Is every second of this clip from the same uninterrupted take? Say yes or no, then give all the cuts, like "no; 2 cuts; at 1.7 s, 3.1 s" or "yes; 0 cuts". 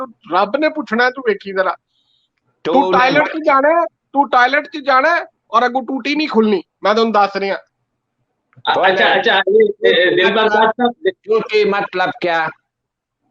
yes; 0 cuts